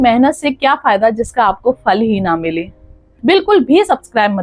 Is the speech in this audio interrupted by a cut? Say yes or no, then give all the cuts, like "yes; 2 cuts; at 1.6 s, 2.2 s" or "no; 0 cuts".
yes; 1 cut; at 3.2 s